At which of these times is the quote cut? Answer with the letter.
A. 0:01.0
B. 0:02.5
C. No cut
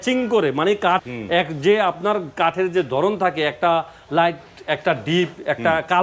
A